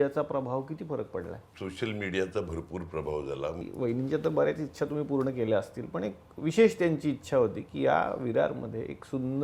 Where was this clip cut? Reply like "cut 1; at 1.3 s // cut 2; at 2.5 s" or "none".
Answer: cut 1; at 1.4 s // cut 2; at 3.6 s